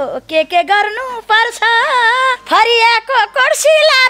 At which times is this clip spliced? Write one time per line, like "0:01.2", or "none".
0:02.4